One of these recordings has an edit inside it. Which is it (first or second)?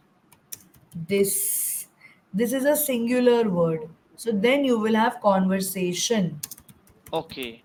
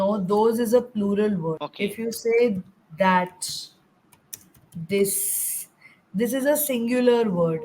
second